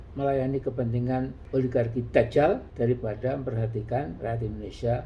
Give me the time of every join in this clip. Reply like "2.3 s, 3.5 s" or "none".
1.4 s, 2.7 s

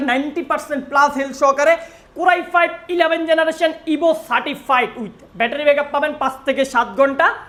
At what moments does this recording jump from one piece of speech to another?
none

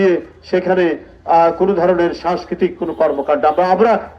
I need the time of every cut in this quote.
none

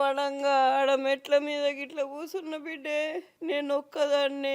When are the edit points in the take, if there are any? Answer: 3.3 s

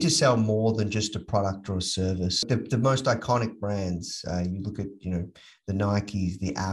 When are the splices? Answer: 2.4 s

